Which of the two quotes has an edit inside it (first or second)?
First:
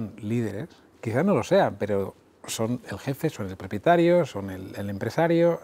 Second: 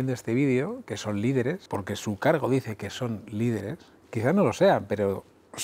second